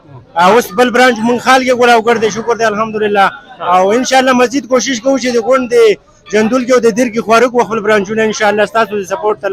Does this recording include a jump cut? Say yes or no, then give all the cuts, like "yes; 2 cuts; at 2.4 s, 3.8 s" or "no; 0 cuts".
no; 0 cuts